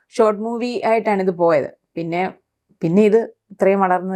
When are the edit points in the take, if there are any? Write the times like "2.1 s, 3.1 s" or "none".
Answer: none